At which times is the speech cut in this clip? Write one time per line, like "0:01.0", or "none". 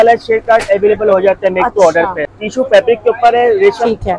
0:02.2